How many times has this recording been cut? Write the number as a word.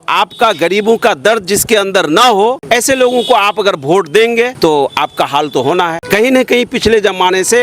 three